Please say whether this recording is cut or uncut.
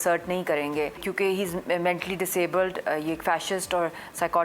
cut